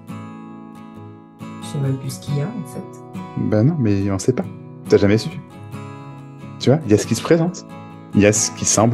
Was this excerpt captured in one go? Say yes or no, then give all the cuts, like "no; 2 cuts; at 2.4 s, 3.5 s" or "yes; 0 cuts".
no; 1 cut; at 1.7 s